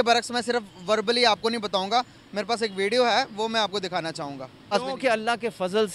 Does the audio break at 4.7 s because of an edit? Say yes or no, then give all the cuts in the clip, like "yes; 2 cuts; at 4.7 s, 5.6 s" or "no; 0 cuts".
yes; 1 cut; at 4.7 s